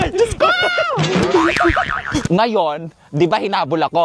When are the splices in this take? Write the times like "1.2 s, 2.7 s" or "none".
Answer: 2.2 s